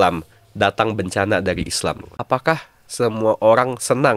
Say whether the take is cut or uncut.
cut